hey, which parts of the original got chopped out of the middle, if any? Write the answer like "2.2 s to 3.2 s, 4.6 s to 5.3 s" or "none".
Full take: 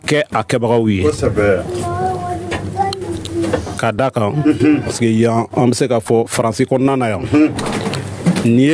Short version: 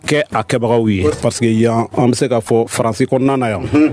1.2 s to 4.8 s